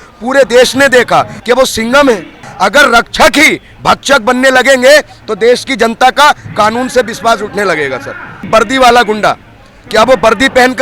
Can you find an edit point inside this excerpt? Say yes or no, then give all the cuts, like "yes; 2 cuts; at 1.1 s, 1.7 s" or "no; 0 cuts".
yes; 3 cuts; at 1.3 s, 2.4 s, 8.5 s